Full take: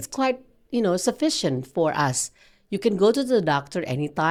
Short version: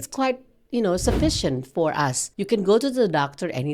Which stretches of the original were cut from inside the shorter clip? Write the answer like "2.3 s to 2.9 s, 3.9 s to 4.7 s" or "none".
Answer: 2.3 s to 2.6 s